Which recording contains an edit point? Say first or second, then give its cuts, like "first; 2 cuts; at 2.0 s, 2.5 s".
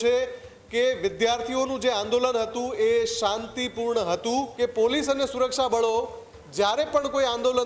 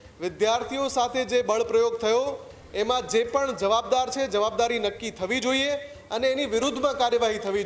first; 1 cut; at 4.5 s